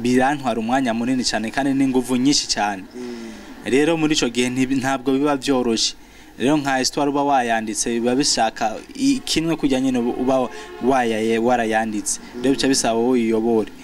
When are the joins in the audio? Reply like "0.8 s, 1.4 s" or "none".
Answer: none